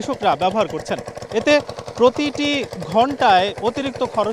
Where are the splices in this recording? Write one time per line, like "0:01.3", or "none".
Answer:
0:01.1